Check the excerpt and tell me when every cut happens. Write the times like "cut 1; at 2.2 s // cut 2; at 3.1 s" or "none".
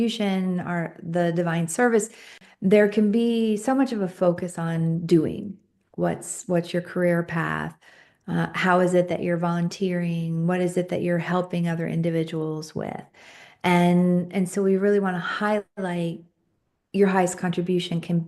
cut 1; at 2.4 s